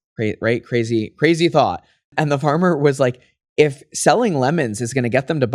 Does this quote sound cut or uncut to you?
uncut